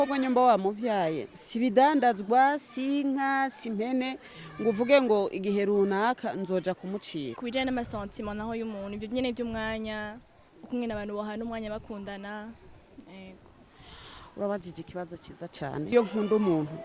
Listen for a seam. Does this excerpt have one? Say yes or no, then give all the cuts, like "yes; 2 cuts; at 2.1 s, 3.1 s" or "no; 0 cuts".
yes; 2 cuts; at 7.4 s, 15.9 s